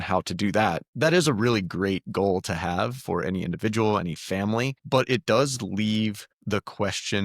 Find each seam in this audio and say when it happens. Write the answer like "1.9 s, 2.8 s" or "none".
0.9 s, 4.8 s, 6.3 s